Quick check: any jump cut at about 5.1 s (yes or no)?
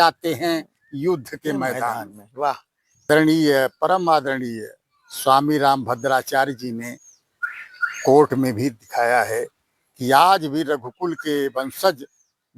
no